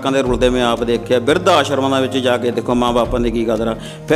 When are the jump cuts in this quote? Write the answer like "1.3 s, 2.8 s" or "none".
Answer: none